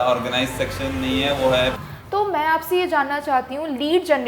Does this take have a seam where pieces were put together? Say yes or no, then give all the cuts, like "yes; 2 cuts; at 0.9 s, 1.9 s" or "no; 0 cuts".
yes; 1 cut; at 1.8 s